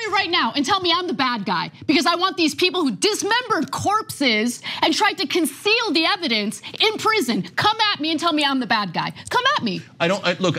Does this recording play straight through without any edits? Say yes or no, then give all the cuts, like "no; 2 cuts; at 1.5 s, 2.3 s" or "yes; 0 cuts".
yes; 0 cuts